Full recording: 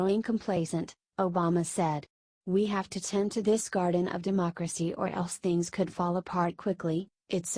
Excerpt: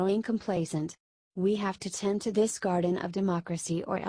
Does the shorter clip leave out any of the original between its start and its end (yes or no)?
yes